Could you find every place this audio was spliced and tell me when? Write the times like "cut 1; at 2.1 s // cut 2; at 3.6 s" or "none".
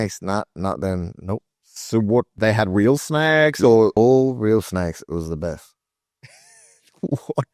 cut 1; at 2.3 s // cut 2; at 3.9 s